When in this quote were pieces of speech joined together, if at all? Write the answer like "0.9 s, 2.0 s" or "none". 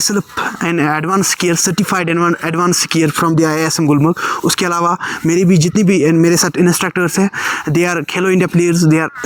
none